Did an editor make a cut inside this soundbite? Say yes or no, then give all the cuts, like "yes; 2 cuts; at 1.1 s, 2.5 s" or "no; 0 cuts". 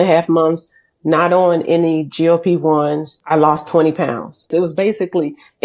yes; 2 cuts; at 3.1 s, 4.5 s